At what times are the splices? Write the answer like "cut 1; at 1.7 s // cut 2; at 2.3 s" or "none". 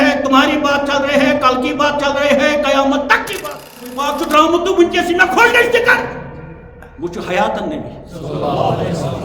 cut 1; at 3.9 s